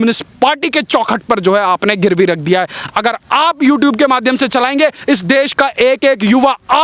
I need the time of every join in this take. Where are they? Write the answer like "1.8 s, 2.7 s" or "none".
2.8 s